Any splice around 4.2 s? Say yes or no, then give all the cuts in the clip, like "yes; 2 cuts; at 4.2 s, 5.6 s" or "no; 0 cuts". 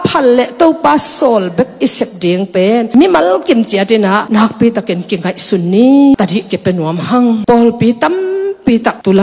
yes; 3 cuts; at 4.2 s, 6.1 s, 7.4 s